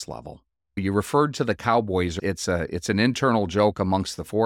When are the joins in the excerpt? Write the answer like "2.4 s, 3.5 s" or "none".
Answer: 2.2 s